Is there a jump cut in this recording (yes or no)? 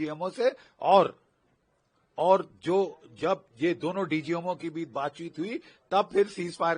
no